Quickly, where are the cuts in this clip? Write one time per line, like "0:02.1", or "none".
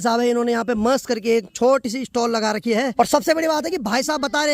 0:02.9